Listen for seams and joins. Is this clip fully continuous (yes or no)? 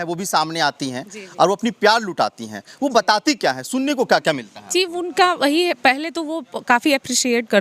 yes